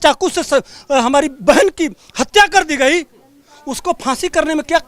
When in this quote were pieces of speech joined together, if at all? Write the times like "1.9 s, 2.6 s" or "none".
none